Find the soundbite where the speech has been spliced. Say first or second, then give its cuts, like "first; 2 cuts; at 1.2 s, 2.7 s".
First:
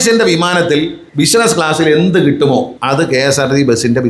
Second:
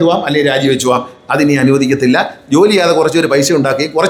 first; 2 cuts; at 1.0 s, 2.8 s